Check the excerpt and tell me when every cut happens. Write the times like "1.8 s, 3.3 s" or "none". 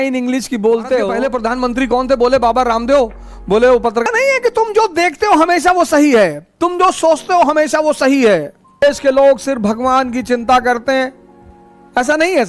1.1 s, 3.6 s, 8.8 s